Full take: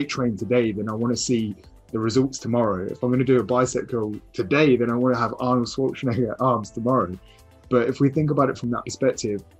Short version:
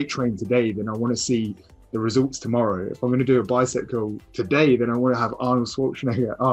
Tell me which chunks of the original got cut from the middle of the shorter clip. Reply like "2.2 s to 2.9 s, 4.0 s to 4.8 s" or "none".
none